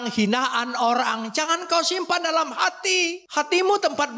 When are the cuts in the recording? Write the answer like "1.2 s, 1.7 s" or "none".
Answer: 3.2 s